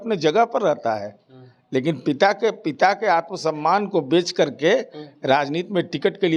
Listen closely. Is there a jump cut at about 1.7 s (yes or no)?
no